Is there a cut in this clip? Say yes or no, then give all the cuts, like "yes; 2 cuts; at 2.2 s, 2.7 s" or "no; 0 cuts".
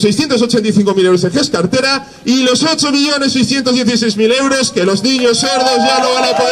no; 0 cuts